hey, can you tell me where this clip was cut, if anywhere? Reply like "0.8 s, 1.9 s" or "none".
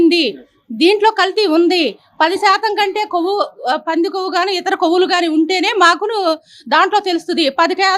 none